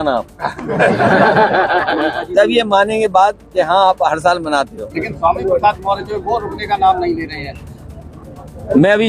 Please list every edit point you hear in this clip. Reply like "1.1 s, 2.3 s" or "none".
4.8 s